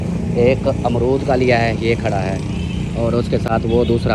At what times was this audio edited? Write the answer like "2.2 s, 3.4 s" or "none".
none